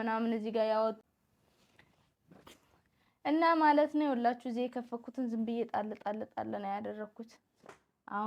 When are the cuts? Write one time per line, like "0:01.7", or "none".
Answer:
0:01.0